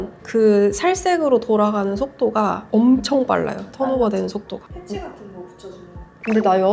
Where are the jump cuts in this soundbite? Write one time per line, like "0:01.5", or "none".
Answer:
0:04.5